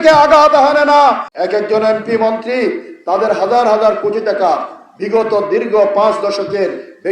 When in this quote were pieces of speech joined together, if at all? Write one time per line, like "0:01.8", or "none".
0:01.3